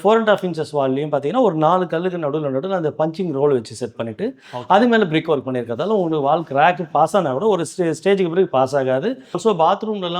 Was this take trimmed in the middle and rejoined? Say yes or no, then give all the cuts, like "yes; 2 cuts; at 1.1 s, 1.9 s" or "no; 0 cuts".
yes; 1 cut; at 9.3 s